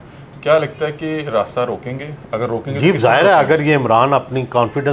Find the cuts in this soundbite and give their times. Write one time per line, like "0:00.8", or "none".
none